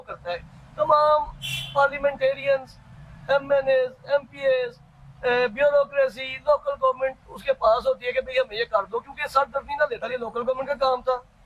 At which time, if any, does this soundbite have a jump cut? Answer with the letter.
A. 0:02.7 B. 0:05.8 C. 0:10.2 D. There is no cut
C